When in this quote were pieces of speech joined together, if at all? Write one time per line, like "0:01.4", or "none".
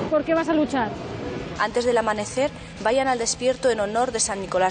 0:01.4